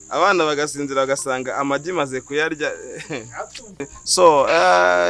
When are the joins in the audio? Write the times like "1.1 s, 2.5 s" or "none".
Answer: 3.8 s

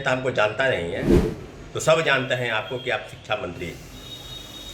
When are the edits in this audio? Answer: none

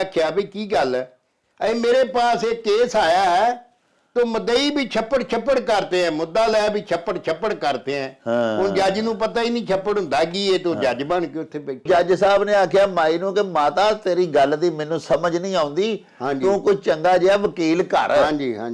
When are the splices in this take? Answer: 11.8 s

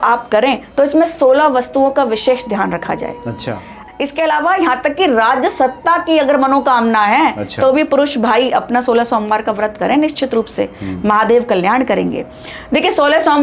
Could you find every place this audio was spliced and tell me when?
3.8 s

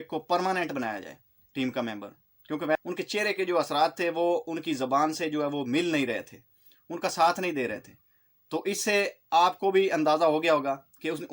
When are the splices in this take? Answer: 2.8 s

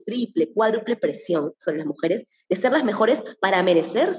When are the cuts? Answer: none

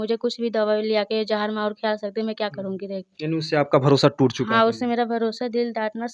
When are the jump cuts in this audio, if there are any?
none

